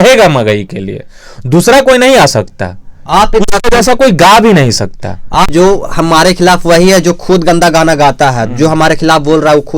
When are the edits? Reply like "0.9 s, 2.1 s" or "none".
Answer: 5.5 s

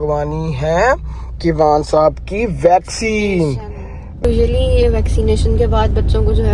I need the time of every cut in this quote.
4.2 s

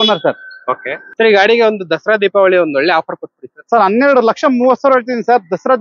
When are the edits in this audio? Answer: 1.0 s

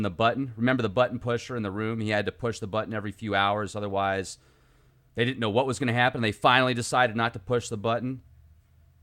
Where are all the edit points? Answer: 1.4 s

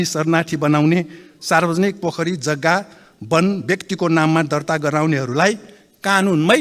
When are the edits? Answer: none

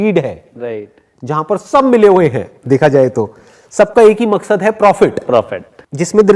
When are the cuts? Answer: 5.3 s

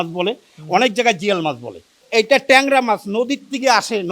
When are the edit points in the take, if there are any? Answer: 2.0 s

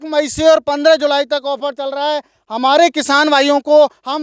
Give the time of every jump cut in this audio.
none

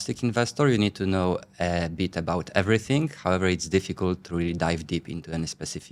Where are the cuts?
none

